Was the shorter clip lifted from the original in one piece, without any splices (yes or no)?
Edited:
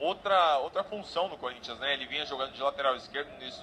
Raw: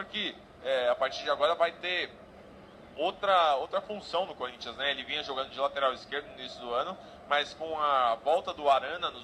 yes